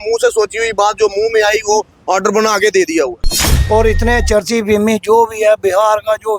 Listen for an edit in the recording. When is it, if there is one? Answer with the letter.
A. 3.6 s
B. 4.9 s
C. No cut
A